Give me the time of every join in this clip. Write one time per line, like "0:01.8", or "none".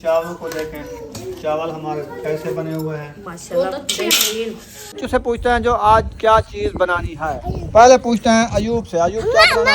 0:05.0